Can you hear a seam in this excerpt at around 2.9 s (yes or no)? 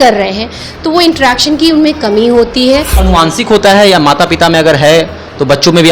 yes